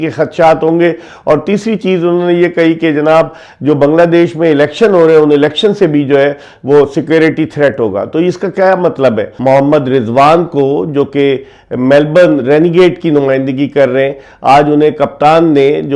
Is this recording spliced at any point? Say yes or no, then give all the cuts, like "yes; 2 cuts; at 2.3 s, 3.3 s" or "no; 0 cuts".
yes; 1 cut; at 9.4 s